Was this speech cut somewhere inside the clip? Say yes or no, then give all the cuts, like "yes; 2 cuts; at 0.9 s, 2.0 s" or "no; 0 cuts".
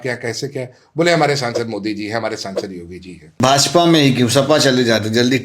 yes; 1 cut; at 3.4 s